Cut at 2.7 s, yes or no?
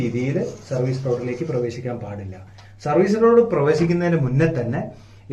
no